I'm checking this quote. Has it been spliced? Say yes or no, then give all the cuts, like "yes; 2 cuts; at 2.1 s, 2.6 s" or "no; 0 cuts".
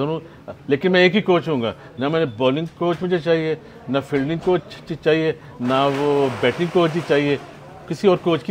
no; 0 cuts